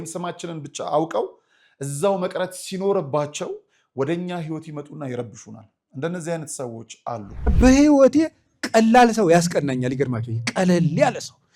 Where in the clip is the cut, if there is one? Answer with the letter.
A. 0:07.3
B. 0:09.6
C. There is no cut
A